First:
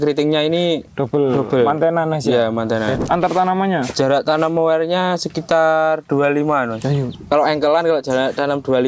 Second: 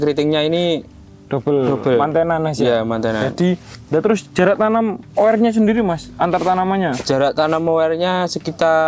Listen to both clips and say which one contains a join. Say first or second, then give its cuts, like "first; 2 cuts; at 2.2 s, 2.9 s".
first; 3 cuts; at 0.9 s, 3.0 s, 7.1 s